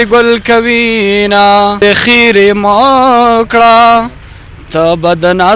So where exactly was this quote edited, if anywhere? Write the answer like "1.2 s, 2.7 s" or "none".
1.8 s

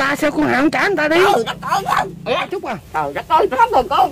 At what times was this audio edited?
2.7 s

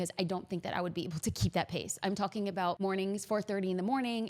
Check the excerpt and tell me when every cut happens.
2.8 s

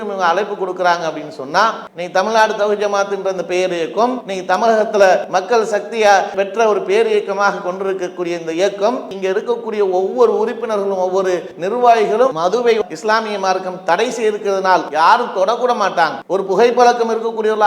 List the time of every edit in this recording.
1.9 s, 4.3 s, 5.3 s, 9.1 s, 11.5 s, 12.3 s, 14.9 s, 16.2 s

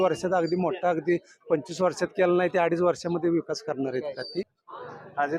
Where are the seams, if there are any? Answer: 4.4 s

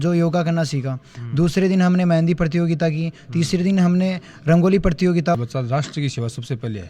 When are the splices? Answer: 5.4 s

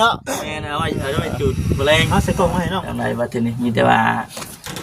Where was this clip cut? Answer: 2.9 s

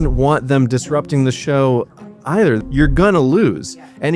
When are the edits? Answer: 2.6 s

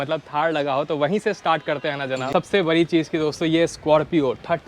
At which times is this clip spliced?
2.3 s

